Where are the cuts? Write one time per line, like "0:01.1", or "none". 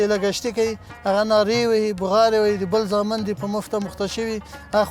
none